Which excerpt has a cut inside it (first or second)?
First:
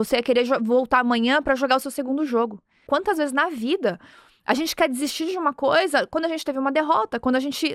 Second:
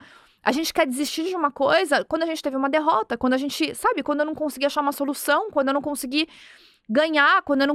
first